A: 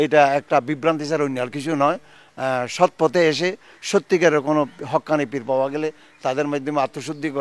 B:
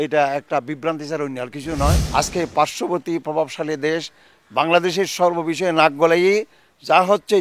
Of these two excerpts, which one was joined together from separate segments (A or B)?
B